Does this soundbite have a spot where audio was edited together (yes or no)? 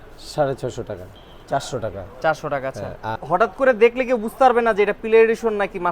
yes